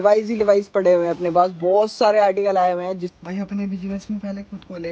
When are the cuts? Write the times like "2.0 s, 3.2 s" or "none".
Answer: 3.1 s